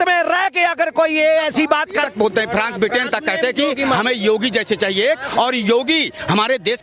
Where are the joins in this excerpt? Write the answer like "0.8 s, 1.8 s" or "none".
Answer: 2.1 s